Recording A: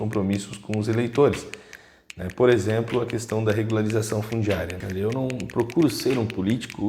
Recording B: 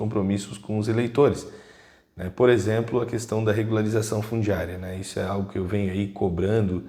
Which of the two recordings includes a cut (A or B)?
A